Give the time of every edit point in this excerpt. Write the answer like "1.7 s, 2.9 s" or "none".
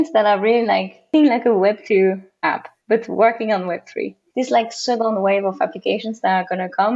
1.1 s, 4.2 s